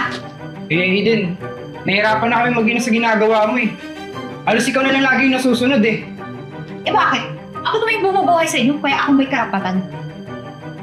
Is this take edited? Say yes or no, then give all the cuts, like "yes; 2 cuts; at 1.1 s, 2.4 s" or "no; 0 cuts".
no; 0 cuts